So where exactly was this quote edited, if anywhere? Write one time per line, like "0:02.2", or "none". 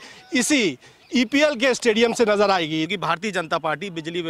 0:02.9